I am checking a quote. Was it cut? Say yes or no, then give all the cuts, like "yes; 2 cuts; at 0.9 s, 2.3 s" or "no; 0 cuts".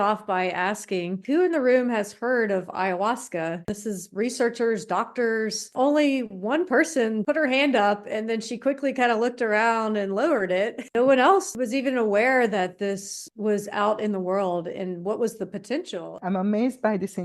yes; 7 cuts; at 1.2 s, 3.7 s, 5.7 s, 7.2 s, 10.9 s, 11.5 s, 16.2 s